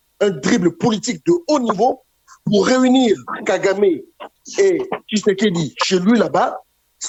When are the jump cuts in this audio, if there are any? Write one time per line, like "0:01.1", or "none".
none